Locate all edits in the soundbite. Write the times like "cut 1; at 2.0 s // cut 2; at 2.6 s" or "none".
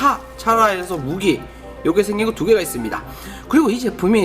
cut 1; at 2.3 s